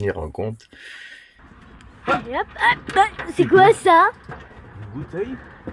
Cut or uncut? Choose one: cut